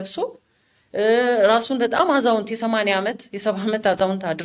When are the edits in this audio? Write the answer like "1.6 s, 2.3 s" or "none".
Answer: none

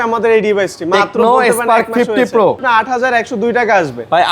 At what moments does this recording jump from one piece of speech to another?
2.6 s

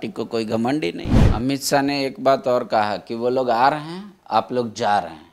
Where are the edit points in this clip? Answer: 1.2 s

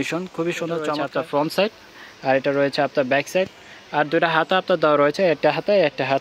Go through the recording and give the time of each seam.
1.0 s

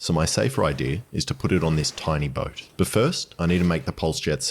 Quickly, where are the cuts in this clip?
none

